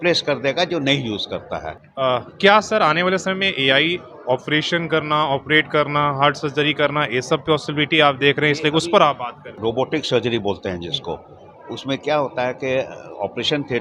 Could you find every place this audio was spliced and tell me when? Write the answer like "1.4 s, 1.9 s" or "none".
1.8 s, 9.5 s